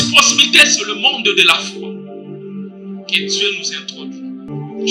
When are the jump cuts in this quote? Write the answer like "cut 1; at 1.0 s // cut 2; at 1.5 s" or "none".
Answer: none